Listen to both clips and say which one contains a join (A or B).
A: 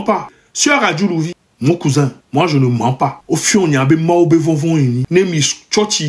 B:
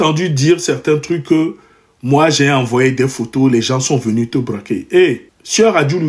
A